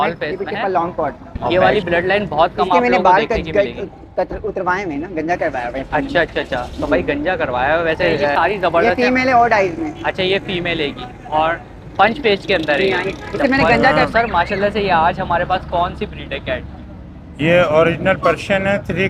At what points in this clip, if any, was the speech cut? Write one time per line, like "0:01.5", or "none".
0:01.5
0:08.3
0:14.0